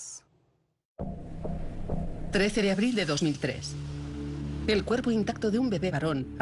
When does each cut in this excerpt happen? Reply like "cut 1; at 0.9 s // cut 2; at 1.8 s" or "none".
cut 1; at 2.9 s

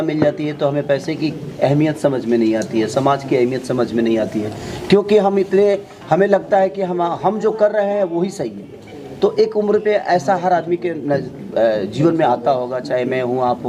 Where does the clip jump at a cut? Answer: none

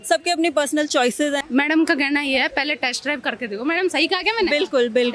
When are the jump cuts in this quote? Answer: cut 1; at 1.4 s

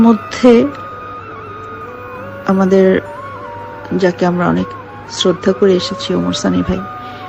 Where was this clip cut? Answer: none

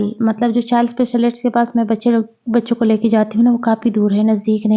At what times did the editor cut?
none

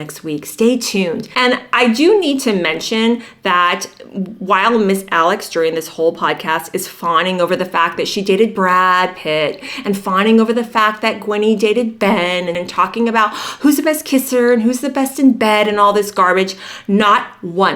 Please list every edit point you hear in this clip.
cut 1; at 1.3 s

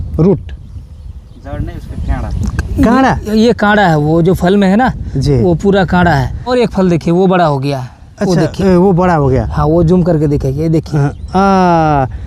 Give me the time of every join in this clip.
cut 1; at 6.5 s

